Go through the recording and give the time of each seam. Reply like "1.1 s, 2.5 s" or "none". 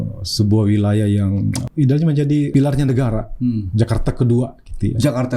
1.6 s, 2.5 s